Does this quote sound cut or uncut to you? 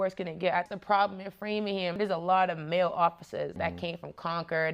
cut